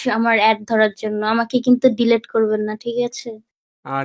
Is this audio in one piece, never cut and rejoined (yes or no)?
yes